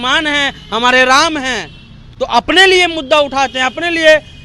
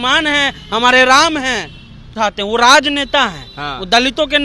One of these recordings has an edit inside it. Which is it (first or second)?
second